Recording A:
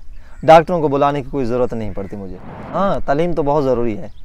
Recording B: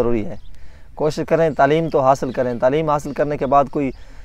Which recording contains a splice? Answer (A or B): A